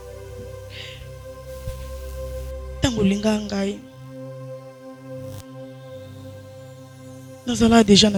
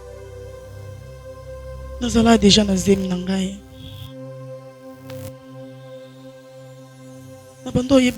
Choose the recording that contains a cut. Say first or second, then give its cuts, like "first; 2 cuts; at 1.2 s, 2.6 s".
second; 3 cuts; at 2.0 s, 3.8 s, 7.4 s